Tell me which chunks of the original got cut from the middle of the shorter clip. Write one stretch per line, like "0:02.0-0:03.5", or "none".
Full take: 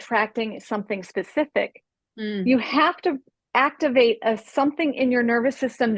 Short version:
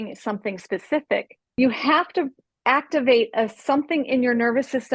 0:02.0-0:02.4

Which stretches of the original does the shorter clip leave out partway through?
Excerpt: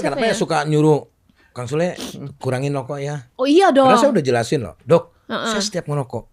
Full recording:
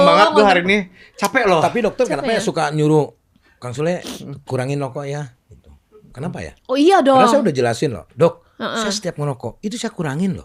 0:05.3-0:06.6

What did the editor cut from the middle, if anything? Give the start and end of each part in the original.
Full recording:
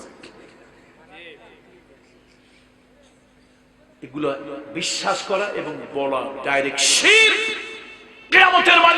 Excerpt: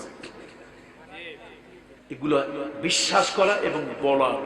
0:02.0-0:03.9

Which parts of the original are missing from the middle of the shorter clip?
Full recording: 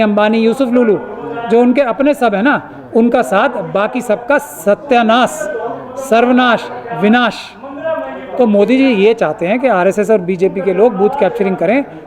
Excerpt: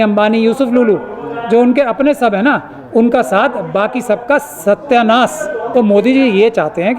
0:05.6-0:08.3

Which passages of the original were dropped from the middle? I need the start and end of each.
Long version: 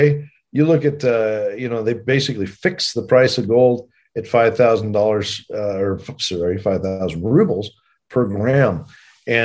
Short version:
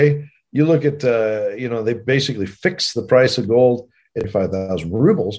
0:04.2-0:06.5

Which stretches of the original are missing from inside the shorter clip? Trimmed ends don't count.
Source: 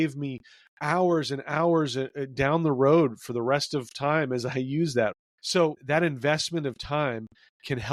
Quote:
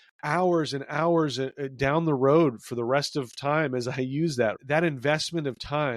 0:05.2-0:05.8

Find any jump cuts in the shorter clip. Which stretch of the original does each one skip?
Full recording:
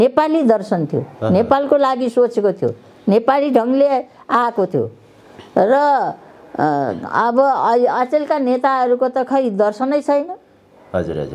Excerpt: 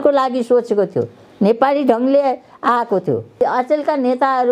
0:05.1-0:07.8

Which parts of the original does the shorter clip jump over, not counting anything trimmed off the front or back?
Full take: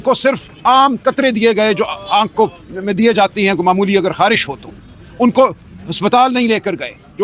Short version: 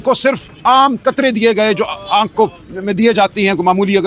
none

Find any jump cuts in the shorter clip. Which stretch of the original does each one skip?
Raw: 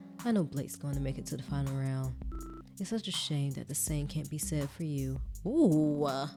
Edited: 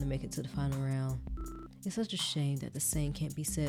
none

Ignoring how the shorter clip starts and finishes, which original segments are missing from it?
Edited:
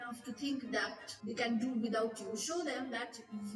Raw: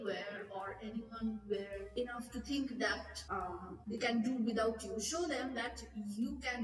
0:03.2-0:03.7

